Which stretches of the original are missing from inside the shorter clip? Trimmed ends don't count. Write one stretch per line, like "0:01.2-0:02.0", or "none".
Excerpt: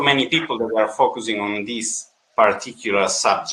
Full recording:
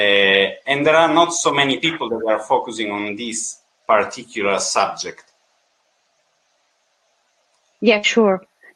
none